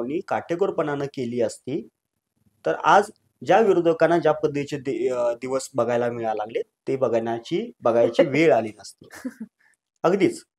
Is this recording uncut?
yes; 0 cuts

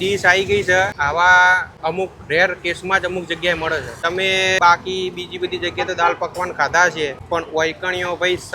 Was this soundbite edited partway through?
yes; 4 cuts; at 1.0 s, 1.7 s, 4.1 s, 7.2 s

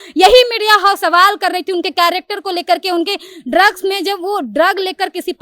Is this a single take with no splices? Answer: yes; 0 cuts

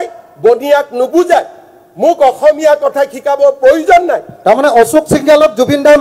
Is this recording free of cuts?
yes; 0 cuts

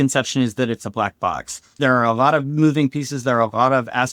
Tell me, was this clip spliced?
yes; 1 cut; at 1.8 s

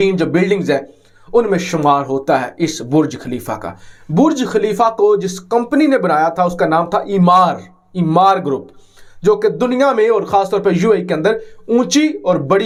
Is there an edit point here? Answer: no; 0 cuts

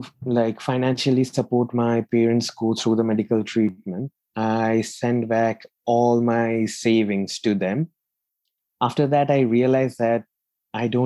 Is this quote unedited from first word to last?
yes; 0 cuts

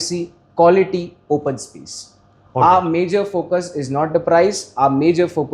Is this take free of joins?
yes; 0 cuts

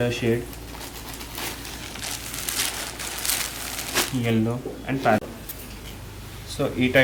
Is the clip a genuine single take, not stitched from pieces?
no; 1 cut; at 5.2 s

